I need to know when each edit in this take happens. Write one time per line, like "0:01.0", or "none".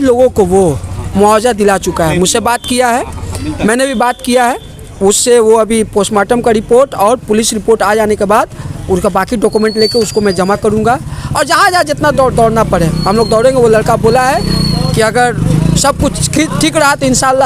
none